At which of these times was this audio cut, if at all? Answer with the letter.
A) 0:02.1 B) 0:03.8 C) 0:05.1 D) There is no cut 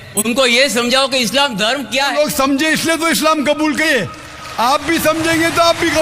A